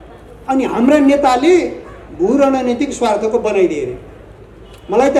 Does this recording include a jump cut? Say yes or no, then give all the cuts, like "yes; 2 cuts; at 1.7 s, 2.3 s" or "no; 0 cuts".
no; 0 cuts